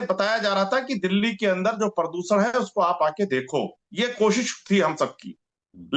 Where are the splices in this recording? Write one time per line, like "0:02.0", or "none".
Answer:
none